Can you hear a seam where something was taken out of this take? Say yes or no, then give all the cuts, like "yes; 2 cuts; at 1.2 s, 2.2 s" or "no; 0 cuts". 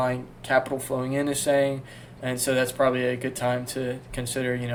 no; 0 cuts